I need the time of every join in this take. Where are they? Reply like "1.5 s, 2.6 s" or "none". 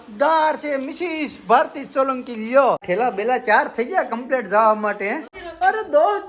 2.8 s, 5.4 s